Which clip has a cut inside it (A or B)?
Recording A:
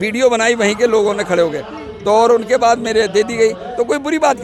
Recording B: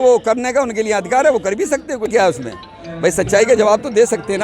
B